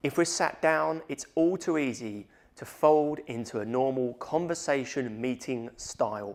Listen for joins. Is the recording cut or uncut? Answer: uncut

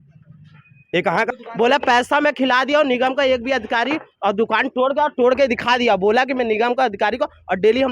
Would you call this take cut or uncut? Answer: cut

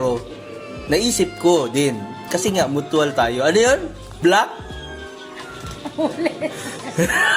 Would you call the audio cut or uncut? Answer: cut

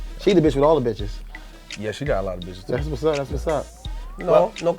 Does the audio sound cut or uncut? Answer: cut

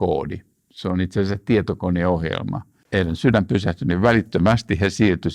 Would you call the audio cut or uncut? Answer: cut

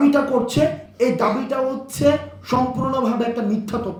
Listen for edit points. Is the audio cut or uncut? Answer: uncut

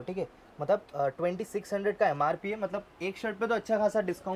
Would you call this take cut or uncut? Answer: uncut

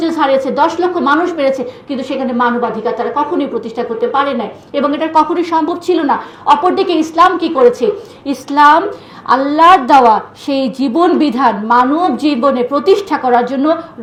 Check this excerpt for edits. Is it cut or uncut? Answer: uncut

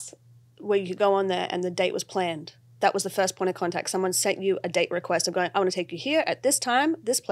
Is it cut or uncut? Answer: uncut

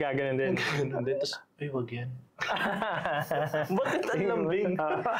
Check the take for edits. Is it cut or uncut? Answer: uncut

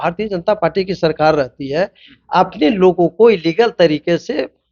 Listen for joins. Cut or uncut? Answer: uncut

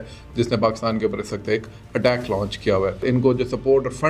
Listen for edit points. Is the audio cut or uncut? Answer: cut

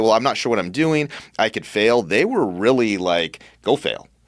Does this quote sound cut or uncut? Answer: uncut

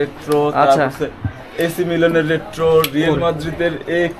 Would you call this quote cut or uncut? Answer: uncut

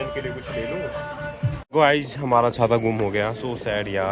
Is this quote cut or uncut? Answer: cut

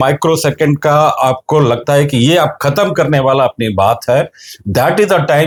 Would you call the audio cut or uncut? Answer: uncut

